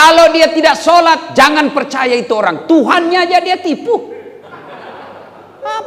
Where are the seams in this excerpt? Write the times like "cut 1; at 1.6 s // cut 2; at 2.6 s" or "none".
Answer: none